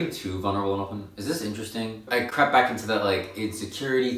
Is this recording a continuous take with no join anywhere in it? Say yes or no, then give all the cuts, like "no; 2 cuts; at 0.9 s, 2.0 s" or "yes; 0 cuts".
no; 1 cut; at 2.1 s